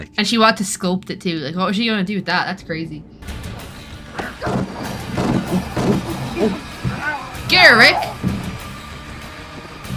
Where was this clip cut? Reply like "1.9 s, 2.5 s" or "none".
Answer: 3.2 s